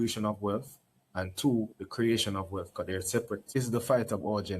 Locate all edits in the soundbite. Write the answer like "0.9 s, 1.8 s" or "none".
3.5 s